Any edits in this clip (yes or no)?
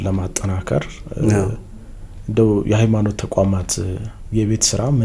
no